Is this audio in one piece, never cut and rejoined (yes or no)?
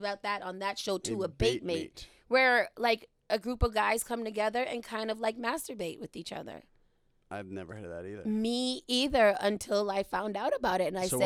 yes